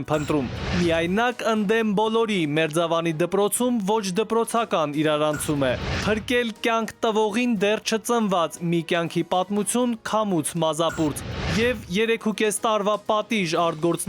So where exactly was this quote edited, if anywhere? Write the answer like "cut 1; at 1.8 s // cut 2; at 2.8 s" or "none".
cut 1; at 5.9 s